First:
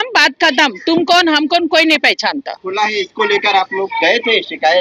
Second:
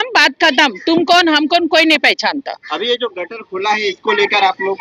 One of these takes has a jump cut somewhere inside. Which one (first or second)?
first